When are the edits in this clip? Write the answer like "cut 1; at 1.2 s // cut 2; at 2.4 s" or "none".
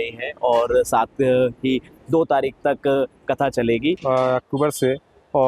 cut 1; at 4.0 s

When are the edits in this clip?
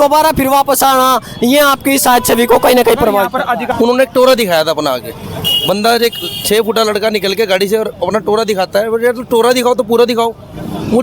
cut 1; at 3.7 s

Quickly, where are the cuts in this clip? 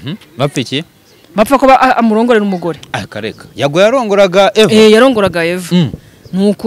none

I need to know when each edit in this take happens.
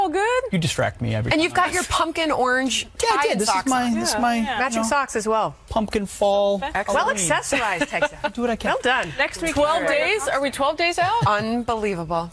cut 1; at 3.3 s

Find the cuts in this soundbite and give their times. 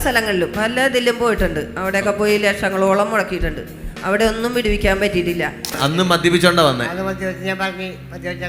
cut 1; at 5.7 s

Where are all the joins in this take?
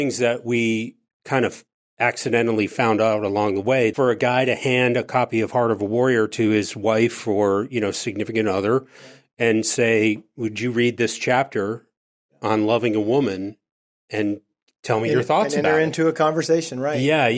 cut 1; at 3.9 s

